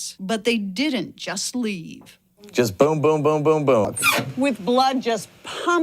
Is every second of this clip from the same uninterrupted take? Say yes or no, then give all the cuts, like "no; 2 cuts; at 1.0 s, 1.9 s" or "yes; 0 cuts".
no; 1 cut; at 4.0 s